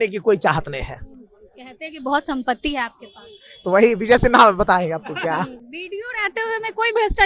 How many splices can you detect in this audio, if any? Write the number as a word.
one